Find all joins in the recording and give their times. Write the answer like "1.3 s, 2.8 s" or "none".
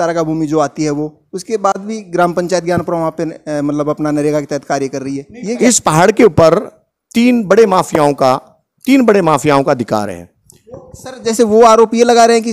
5.6 s